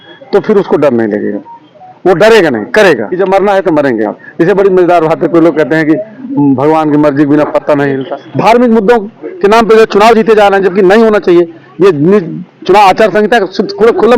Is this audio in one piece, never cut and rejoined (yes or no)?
no